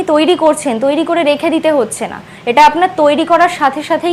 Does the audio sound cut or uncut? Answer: uncut